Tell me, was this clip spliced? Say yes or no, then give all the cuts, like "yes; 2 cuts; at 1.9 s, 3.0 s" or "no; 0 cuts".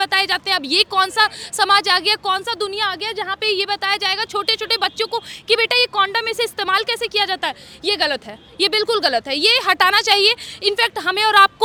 no; 0 cuts